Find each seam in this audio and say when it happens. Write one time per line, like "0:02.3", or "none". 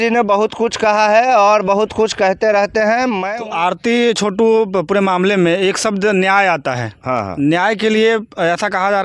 0:03.2